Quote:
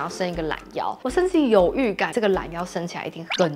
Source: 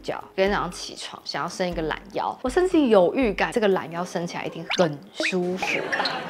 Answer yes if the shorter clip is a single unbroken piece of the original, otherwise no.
yes